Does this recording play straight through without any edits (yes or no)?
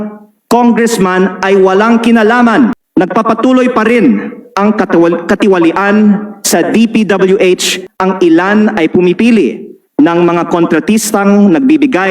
no